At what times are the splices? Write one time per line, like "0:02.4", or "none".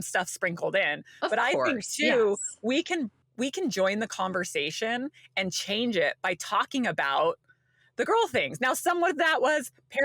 none